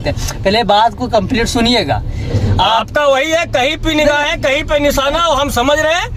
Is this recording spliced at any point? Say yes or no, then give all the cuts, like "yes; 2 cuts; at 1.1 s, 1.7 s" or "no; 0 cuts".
no; 0 cuts